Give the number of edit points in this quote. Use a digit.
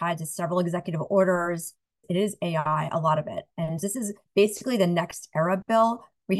2